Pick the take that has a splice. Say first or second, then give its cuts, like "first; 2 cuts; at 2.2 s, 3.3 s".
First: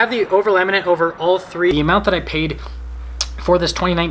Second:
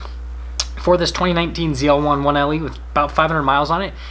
first; 1 cut; at 1.7 s